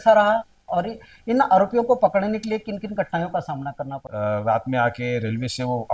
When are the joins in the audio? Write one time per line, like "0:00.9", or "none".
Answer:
0:04.0